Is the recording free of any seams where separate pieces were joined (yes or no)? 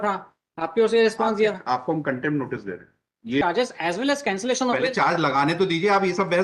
no